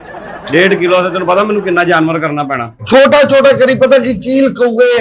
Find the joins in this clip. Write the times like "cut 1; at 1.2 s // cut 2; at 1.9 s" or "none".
cut 1; at 2.7 s